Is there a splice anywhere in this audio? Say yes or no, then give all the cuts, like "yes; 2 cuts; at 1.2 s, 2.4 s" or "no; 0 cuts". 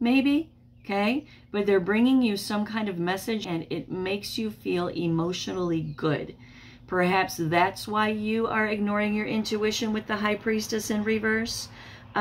yes; 1 cut; at 3.4 s